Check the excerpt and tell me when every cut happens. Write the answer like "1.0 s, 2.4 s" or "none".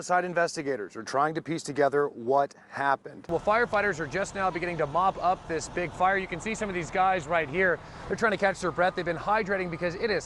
3.3 s